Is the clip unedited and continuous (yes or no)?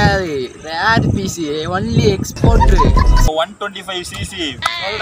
no